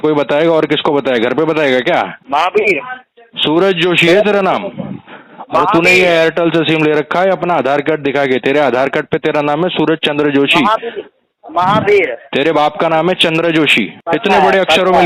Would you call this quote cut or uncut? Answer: cut